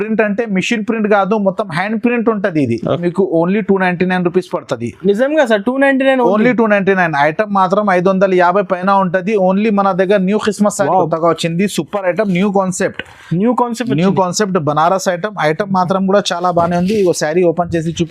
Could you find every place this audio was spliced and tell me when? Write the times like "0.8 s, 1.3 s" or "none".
3.0 s, 10.8 s